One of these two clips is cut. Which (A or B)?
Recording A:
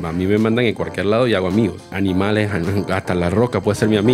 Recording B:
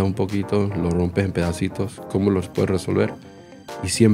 A